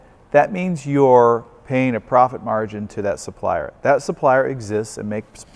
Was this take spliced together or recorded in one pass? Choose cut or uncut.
uncut